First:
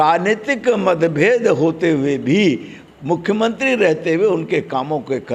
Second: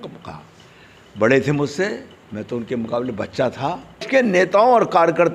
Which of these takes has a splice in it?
second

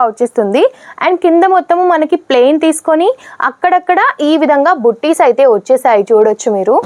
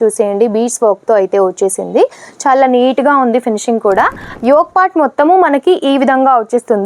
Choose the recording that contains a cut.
second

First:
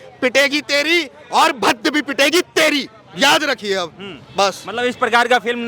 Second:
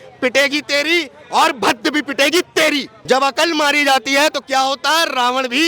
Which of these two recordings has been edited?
second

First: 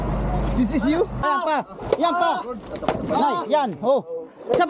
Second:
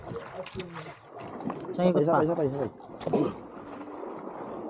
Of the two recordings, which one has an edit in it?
first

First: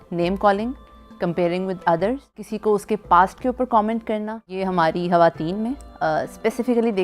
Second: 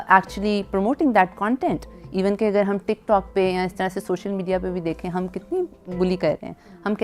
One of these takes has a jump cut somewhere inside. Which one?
first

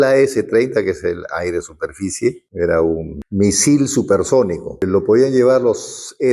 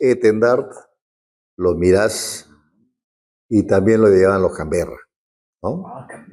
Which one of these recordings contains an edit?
first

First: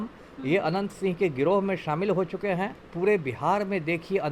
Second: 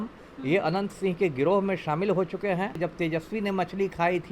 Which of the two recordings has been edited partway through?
second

